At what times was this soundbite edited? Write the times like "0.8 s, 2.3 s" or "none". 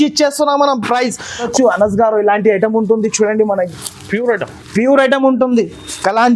1.5 s